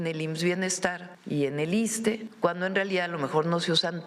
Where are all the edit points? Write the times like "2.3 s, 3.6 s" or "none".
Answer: 1.1 s, 2.3 s